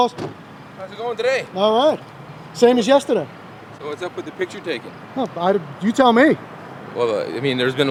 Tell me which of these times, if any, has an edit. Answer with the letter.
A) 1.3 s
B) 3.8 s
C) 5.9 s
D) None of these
D